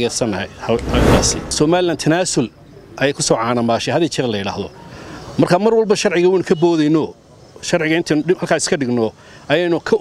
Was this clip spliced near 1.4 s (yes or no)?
yes